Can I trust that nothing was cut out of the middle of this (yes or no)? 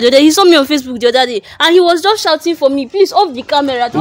yes